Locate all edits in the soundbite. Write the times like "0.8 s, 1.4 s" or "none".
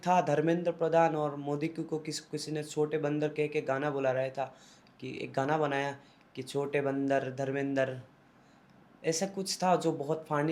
none